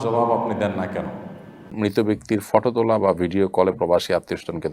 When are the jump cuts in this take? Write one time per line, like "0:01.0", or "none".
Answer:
0:01.7